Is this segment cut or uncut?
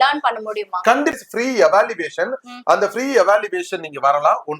cut